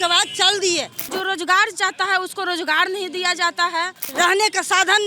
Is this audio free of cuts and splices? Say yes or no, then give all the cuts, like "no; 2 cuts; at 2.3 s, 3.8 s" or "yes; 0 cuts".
no; 2 cuts; at 1.1 s, 4.0 s